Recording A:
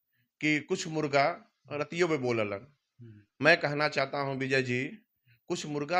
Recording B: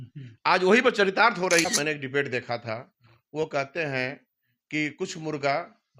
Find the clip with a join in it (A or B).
B